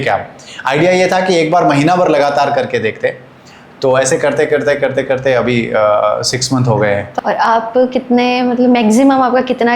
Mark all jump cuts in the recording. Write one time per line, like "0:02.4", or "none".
0:07.1